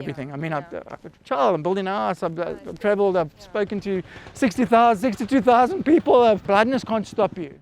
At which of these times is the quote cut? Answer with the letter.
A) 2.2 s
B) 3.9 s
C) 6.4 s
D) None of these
C